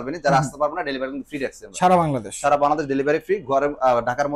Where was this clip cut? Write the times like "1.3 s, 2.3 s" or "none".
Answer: none

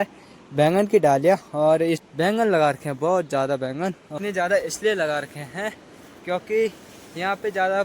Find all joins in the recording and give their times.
2.0 s, 4.1 s

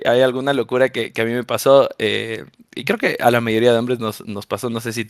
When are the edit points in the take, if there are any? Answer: none

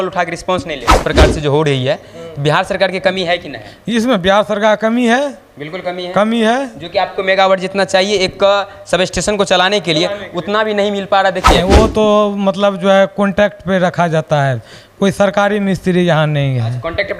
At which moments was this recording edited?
0.9 s, 11.6 s

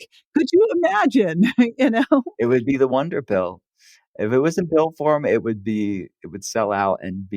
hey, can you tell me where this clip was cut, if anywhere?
2.3 s

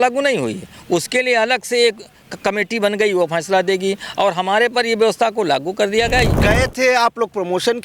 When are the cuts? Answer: 6.4 s

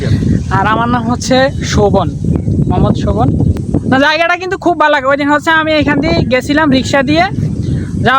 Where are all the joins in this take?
3.5 s

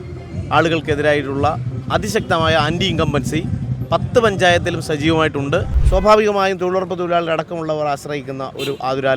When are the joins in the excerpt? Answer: 5.8 s

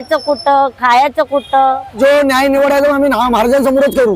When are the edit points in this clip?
2.0 s

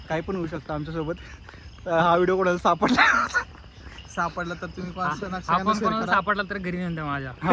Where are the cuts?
none

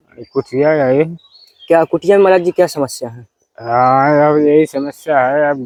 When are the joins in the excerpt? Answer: none

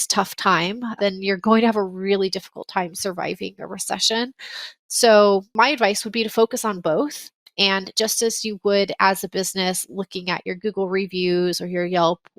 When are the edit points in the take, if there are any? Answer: 0.9 s

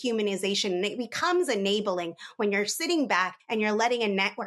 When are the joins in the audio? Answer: none

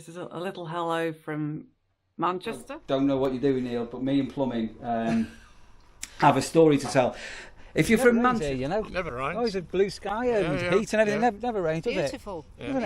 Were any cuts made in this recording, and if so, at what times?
2.7 s, 8.4 s

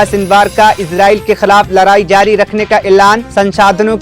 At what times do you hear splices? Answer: none

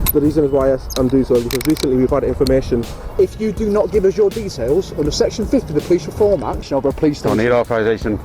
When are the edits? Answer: 3.0 s, 6.7 s

